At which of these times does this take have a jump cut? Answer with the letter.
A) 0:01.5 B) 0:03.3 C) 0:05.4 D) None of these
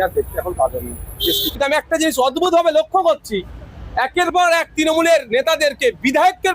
A